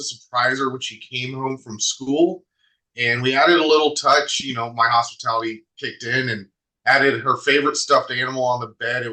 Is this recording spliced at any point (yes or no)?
no